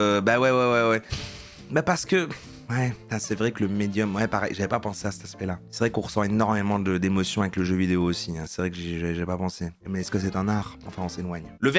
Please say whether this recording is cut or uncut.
uncut